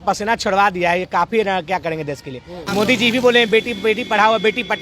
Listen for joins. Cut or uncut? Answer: cut